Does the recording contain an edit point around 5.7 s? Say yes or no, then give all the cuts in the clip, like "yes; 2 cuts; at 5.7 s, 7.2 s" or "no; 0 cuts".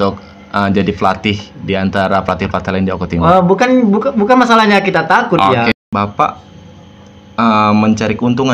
yes; 1 cut; at 5.7 s